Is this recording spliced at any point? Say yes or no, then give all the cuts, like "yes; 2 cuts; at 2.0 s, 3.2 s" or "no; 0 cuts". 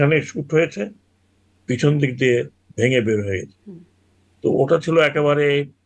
no; 0 cuts